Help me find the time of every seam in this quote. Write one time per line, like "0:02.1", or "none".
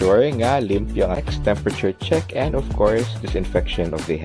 0:01.2